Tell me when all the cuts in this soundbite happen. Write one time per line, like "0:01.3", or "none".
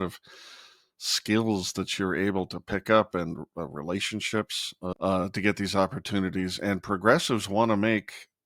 0:04.9

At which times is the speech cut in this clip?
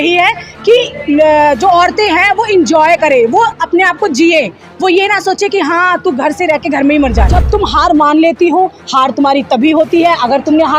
0:07.4

